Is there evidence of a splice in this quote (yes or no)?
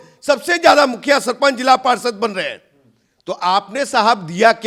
no